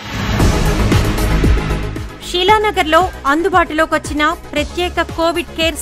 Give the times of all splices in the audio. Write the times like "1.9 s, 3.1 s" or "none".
1.8 s